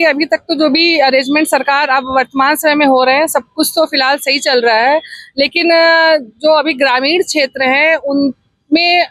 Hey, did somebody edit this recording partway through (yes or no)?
no